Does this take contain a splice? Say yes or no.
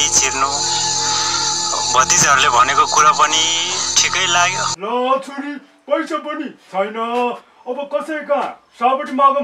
yes